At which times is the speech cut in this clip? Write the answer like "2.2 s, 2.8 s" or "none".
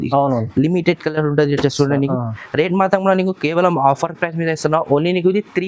none